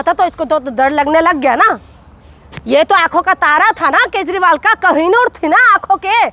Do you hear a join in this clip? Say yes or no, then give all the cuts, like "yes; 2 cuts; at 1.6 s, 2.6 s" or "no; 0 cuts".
no; 0 cuts